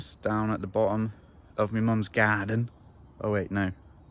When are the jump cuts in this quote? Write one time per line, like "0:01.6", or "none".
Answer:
none